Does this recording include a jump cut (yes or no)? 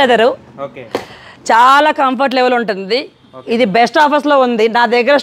no